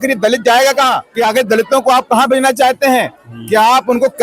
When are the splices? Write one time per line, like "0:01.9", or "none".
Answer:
0:01.0